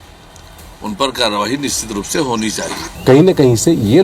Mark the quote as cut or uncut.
cut